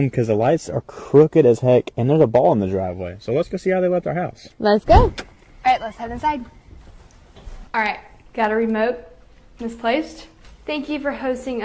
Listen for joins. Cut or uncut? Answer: cut